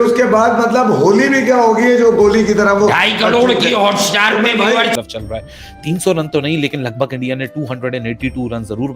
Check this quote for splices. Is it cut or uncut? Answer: cut